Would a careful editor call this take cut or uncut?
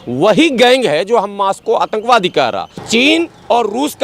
cut